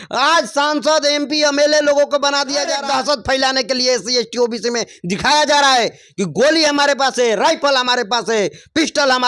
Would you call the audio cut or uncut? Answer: cut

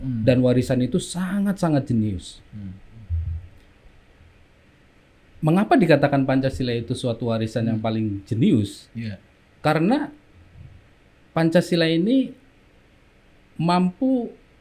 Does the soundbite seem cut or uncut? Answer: uncut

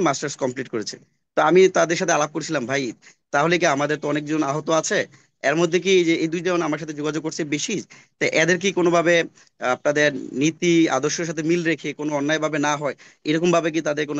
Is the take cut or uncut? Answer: uncut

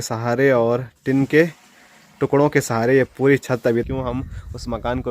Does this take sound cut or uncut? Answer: cut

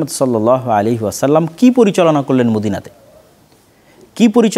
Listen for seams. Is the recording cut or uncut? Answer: uncut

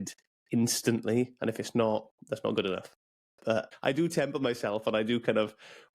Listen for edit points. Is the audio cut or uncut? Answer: cut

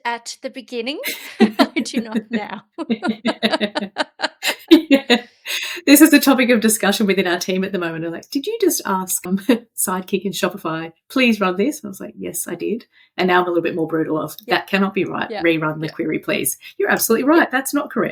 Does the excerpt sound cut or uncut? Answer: uncut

